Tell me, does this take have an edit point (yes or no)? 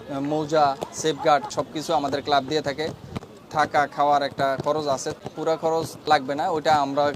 yes